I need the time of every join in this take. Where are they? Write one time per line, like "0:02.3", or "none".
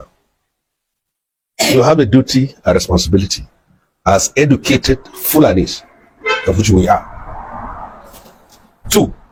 none